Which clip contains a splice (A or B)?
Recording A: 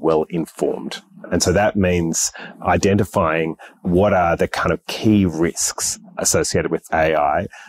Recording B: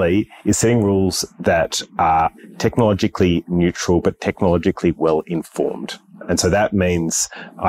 B